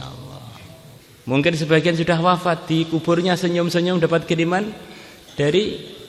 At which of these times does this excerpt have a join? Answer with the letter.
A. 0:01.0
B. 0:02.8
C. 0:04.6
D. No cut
A